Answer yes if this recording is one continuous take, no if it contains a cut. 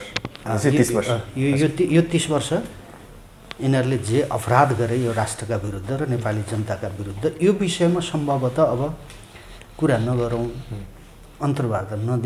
yes